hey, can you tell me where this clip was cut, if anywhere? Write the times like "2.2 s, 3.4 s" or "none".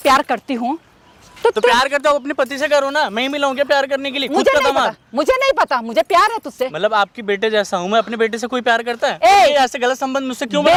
none